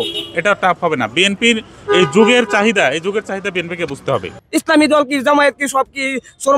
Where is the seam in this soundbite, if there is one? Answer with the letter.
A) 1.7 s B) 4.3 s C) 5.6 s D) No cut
B